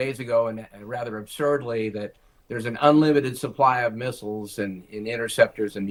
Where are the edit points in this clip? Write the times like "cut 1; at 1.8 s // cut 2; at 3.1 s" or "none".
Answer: none